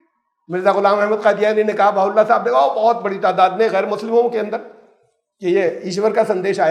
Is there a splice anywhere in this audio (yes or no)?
no